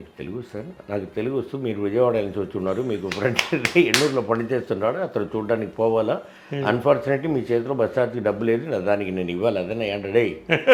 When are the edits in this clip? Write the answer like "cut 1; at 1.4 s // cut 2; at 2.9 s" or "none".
none

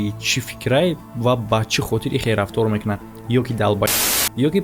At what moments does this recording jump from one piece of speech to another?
none

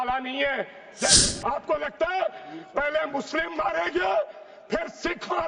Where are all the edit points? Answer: cut 1; at 1.2 s

